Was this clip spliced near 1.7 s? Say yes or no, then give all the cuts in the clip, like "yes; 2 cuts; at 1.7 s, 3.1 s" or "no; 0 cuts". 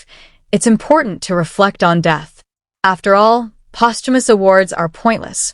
no; 1 cut; at 4.3 s